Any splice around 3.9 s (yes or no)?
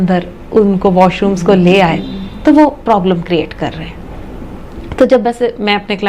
no